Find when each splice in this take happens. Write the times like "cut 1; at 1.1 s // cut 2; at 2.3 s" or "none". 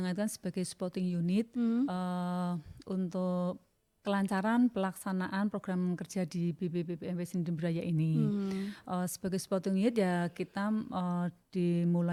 none